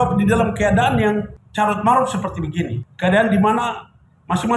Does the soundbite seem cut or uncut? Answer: uncut